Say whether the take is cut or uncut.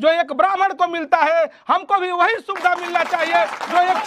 uncut